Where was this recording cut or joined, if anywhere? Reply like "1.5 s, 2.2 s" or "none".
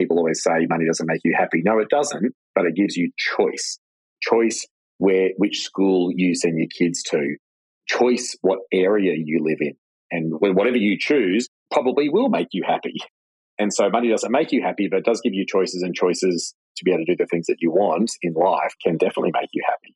4.2 s, 9.7 s